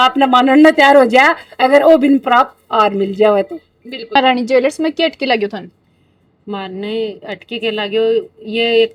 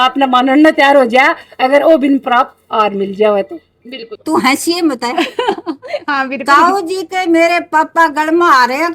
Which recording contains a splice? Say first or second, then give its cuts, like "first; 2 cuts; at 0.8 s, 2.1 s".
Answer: second; 1 cut; at 4.0 s